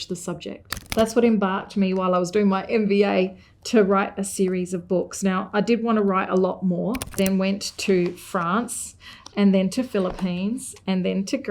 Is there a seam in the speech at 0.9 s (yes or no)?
yes